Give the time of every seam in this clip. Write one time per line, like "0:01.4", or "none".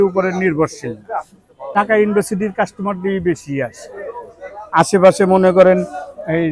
0:01.8